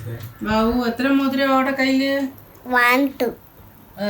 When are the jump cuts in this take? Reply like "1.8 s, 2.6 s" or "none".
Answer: 2.5 s